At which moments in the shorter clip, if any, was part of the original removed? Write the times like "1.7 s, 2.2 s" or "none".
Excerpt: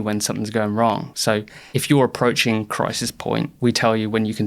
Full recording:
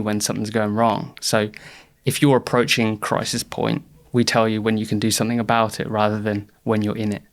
1.2 s, 3.5 s